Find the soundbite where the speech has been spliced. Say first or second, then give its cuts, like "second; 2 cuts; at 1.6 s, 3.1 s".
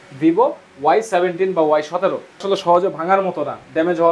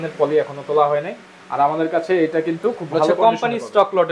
first; 1 cut; at 2.4 s